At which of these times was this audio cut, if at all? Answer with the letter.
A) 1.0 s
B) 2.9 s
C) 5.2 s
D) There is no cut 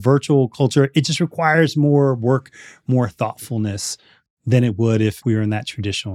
C